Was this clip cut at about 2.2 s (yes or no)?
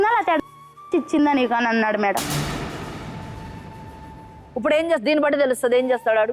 yes